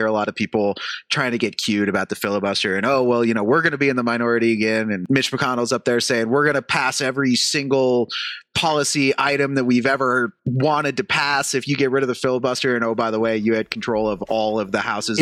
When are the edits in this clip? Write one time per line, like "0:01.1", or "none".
0:05.0